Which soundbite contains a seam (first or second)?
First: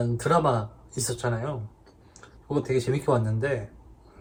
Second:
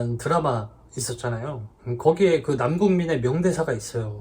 second